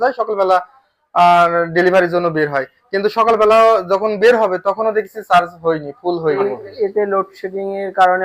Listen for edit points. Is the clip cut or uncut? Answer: cut